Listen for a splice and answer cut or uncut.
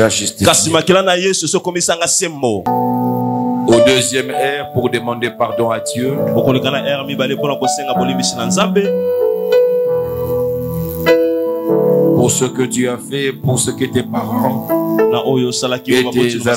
cut